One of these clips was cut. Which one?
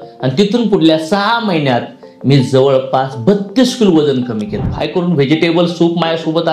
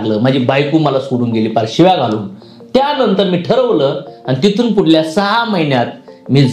first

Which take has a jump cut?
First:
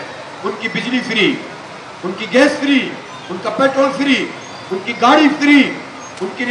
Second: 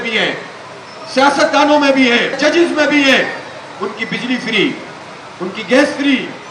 second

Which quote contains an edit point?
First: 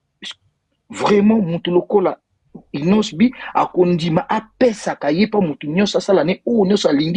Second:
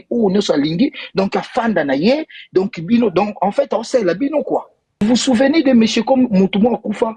second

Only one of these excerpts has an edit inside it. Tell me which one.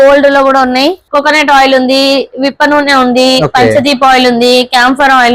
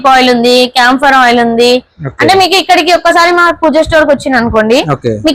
first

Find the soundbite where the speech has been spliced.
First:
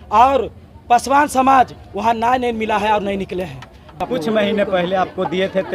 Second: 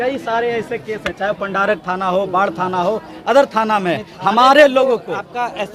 first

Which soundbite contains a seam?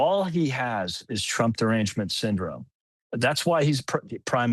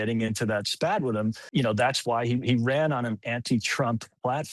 second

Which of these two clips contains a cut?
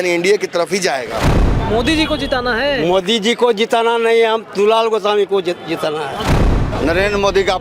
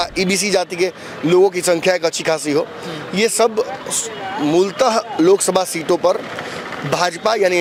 first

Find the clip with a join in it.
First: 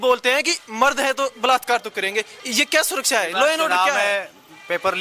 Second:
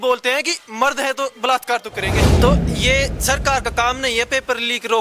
second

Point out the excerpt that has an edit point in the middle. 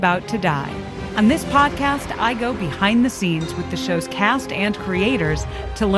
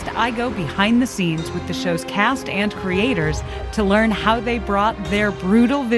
first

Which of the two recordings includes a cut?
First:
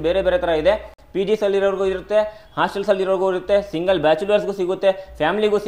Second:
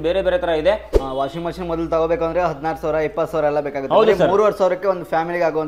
second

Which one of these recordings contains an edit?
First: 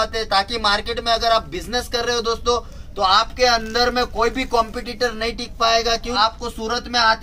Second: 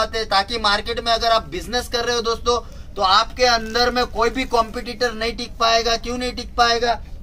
first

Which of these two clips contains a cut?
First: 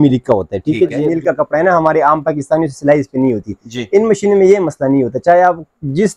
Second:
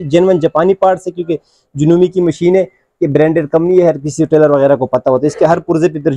first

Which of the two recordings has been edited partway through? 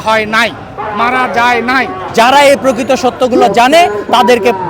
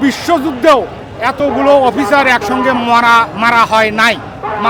first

